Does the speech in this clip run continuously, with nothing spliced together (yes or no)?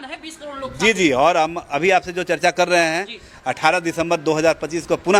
yes